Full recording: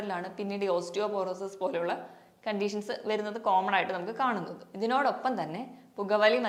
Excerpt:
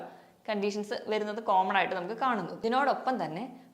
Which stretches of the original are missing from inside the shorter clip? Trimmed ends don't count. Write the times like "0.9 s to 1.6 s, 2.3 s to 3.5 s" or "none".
4.5 s to 4.7 s